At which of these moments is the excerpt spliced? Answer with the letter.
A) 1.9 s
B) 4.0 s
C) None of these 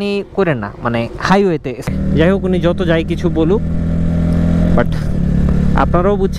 A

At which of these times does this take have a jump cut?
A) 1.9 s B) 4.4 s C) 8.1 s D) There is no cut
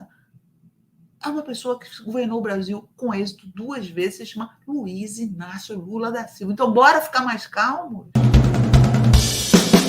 C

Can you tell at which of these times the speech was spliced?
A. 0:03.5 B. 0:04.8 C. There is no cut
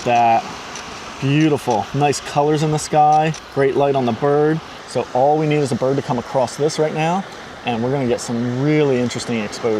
B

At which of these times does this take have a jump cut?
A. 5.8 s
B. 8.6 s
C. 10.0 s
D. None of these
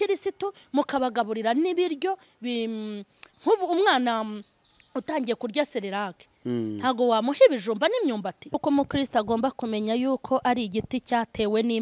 B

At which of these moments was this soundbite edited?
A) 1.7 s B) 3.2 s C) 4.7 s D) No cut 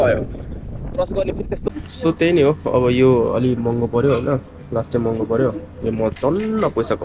A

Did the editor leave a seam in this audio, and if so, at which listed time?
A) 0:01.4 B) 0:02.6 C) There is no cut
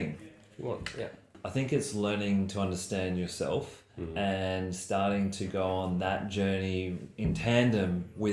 A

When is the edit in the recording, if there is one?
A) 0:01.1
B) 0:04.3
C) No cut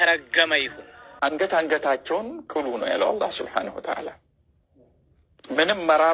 A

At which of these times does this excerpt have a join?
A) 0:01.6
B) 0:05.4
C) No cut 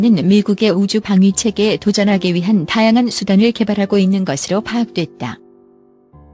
B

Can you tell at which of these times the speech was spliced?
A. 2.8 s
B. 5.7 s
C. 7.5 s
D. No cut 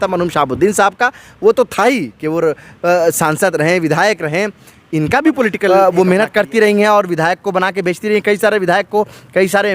B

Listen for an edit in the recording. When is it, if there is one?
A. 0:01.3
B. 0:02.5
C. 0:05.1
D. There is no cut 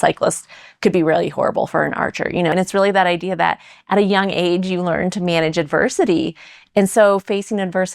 B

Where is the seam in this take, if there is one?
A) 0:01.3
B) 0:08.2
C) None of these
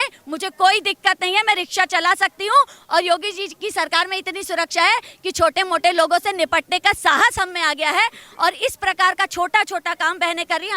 C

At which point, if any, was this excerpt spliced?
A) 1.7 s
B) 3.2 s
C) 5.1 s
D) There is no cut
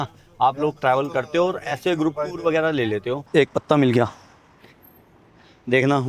B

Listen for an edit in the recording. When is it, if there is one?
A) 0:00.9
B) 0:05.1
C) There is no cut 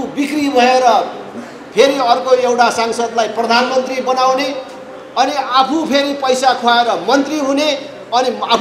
C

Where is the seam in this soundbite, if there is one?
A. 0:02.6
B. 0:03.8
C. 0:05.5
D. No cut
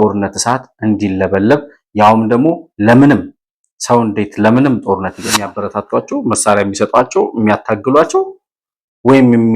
C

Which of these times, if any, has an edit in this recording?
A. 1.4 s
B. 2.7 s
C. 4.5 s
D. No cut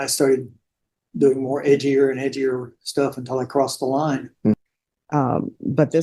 C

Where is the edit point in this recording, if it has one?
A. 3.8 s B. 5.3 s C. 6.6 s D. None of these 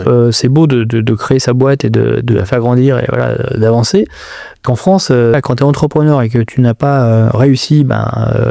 B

